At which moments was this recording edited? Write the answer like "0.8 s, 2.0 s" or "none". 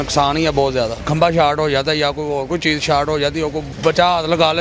1.0 s, 3.7 s